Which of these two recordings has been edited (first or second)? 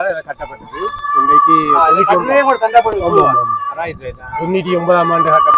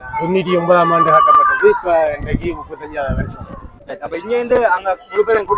second